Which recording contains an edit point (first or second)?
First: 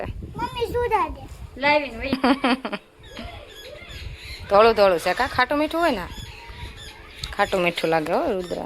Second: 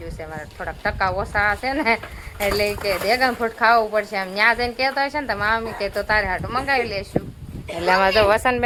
first